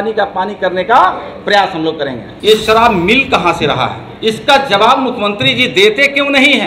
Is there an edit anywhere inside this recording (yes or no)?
yes